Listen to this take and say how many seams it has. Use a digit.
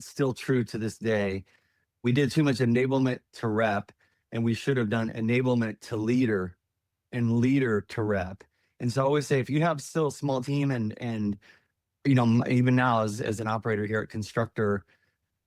1